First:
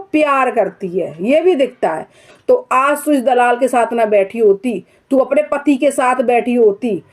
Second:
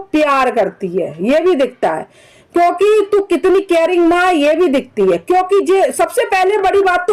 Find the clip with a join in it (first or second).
first